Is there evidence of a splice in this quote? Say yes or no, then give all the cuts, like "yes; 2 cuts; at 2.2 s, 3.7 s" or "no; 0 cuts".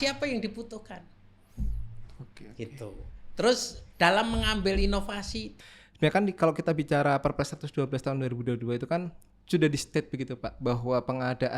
yes; 1 cut; at 5.5 s